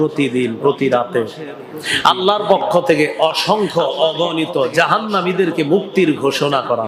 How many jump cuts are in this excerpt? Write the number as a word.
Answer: zero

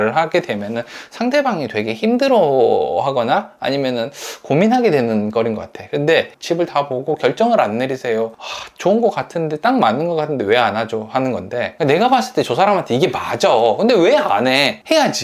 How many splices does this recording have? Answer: two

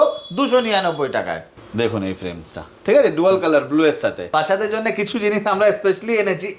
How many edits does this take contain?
two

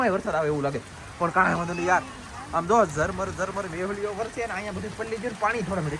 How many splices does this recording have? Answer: zero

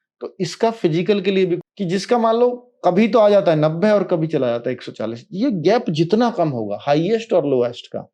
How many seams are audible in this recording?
one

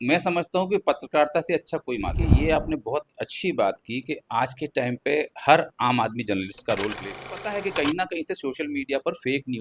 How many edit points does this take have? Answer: two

